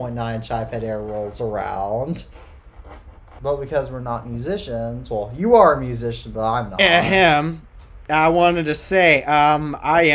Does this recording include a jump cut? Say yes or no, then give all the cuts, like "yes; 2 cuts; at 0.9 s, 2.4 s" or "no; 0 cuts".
yes; 1 cut; at 3.3 s